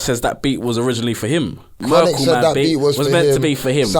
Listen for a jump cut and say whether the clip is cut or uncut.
cut